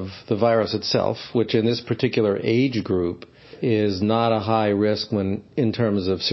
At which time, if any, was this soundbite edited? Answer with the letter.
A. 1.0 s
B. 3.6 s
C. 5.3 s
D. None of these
B